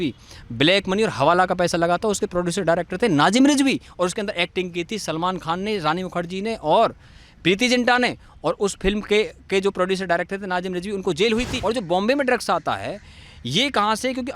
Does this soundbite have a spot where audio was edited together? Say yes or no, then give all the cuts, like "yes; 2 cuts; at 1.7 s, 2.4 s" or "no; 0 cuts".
yes; 1 cut; at 11.5 s